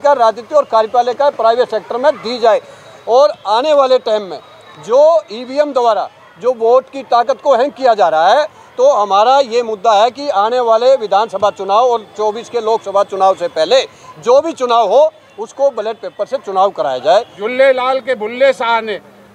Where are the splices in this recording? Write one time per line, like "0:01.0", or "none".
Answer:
0:17.4

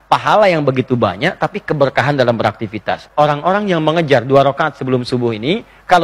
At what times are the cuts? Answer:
0:03.0

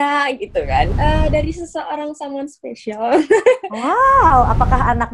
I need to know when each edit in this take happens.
0:00.9

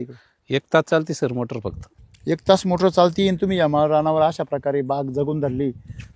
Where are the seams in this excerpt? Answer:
0:01.8

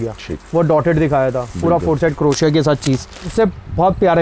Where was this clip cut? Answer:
0:03.3

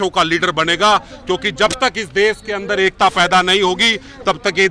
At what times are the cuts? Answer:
none

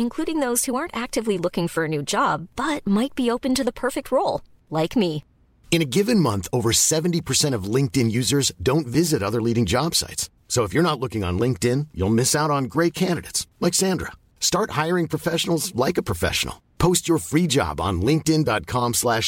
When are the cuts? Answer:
none

